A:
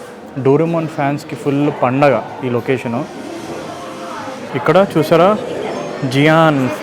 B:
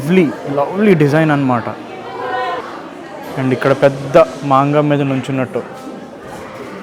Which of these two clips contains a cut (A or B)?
A